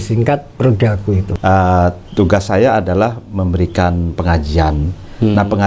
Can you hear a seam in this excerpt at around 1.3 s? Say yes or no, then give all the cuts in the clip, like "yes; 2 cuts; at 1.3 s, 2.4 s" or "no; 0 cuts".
yes; 1 cut; at 1.3 s